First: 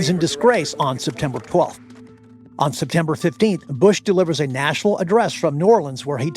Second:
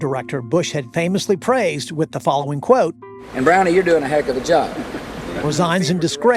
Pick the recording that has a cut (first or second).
first